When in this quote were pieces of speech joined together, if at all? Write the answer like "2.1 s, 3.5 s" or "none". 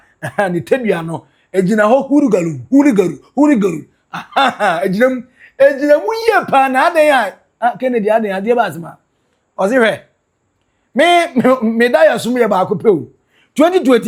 none